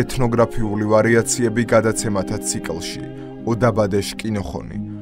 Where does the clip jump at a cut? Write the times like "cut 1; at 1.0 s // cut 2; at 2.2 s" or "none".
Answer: none

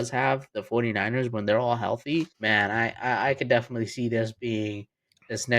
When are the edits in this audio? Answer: cut 1; at 2.4 s

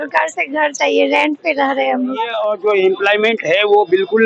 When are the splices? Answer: cut 1; at 2.4 s

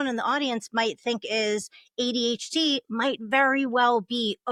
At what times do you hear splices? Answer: none

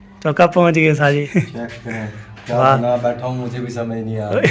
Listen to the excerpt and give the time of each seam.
cut 1; at 1.3 s

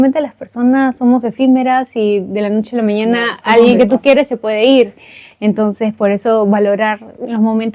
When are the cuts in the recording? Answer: none

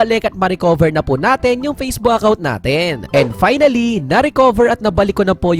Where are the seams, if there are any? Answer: cut 1; at 3.1 s

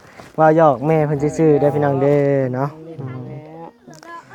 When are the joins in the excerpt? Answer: none

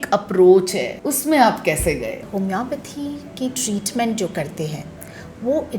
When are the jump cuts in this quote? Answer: cut 1; at 0.9 s // cut 2; at 2.3 s

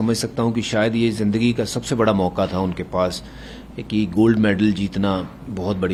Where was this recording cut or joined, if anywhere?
none

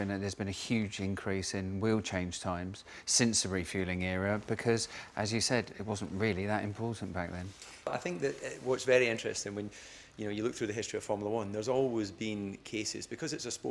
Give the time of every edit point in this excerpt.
cut 1; at 7.9 s

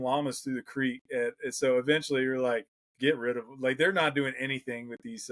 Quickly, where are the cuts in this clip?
none

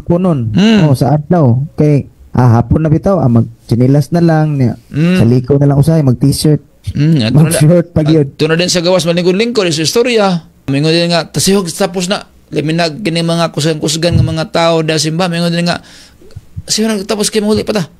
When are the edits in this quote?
cut 1; at 10.7 s

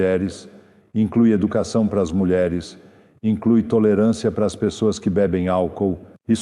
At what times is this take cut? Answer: none

